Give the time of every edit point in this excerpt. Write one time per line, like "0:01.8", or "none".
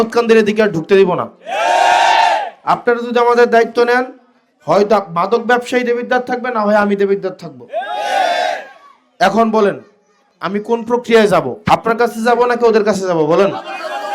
none